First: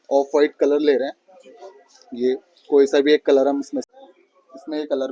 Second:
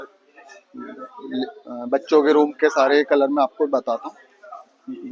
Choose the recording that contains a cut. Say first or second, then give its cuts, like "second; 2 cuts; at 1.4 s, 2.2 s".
first; 1 cut; at 3.8 s